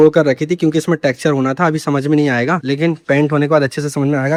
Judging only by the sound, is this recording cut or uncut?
uncut